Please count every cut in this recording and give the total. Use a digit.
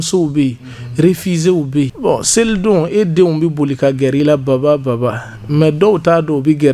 1